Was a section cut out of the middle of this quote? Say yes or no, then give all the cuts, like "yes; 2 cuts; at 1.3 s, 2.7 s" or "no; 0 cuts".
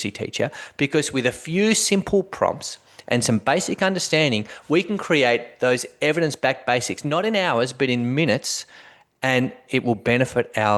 no; 0 cuts